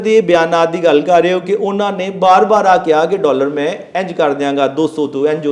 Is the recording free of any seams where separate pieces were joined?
yes; 0 cuts

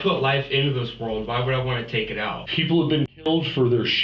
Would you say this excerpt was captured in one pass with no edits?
no; 1 cut; at 2.4 s

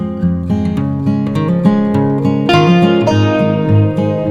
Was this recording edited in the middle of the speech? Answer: no; 0 cuts

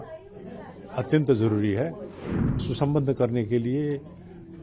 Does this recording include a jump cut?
yes; 1 cut; at 2.6 s

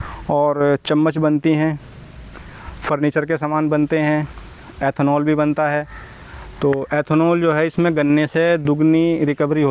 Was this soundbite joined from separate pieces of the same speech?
no; 0 cuts

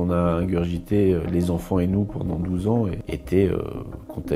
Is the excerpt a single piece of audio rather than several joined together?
no; 1 cut; at 3.1 s

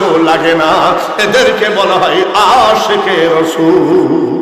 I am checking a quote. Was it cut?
no; 0 cuts

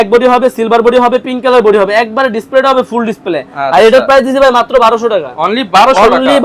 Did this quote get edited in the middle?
no; 0 cuts

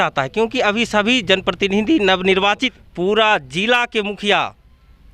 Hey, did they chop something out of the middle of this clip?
yes; 1 cut; at 2.8 s

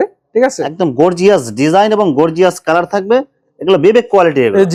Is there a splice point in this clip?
no; 0 cuts

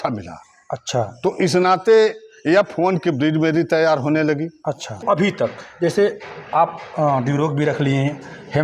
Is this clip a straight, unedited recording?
no; 1 cut; at 5.0 s

